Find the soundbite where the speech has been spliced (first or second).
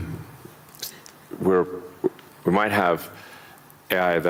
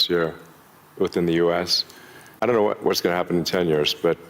second